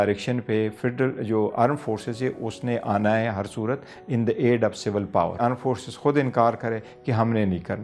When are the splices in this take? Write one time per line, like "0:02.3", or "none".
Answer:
0:05.4